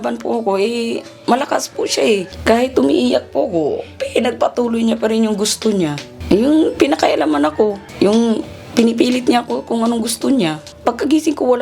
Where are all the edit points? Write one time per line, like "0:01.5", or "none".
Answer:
0:02.3
0:06.1
0:07.8
0:10.7